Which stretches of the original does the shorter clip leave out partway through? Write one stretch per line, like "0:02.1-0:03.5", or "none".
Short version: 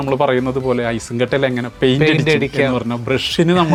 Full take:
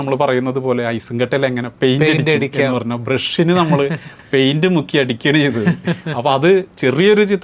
none

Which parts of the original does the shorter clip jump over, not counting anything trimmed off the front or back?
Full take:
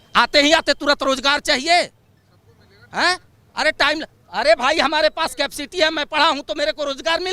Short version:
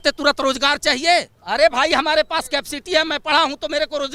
0:02.0-0:04.2

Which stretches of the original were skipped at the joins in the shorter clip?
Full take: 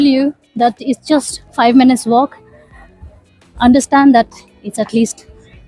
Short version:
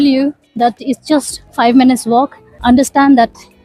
0:02.4-0:03.4

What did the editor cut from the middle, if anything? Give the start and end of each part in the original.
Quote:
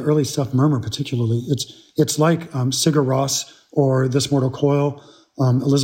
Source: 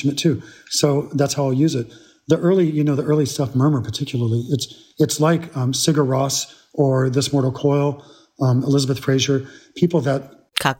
none

